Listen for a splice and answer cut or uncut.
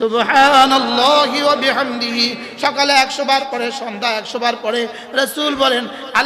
uncut